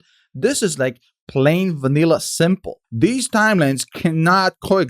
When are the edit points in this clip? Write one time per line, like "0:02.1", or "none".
0:02.8

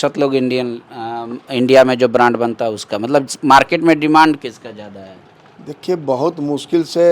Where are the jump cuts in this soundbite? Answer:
none

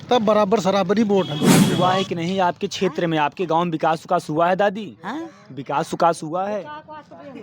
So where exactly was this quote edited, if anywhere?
0:01.6

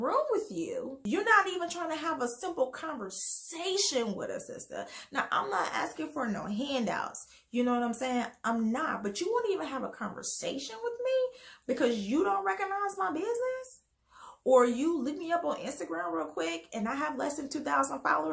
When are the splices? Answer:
0:00.9

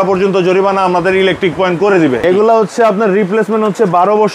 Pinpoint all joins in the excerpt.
0:02.2

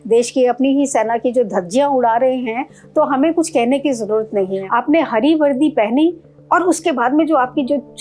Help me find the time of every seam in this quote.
0:04.6

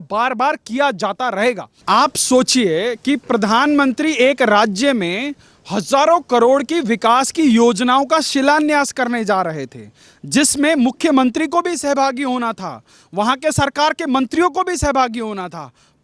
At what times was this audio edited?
0:01.7

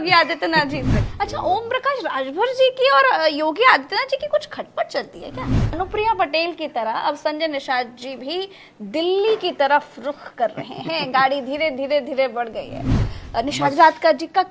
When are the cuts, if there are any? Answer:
0:01.0
0:05.8
0:13.1

